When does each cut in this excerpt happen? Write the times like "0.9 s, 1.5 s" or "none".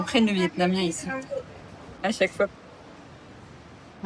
none